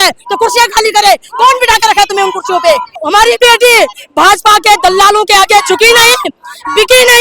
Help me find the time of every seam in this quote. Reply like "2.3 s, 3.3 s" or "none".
2.9 s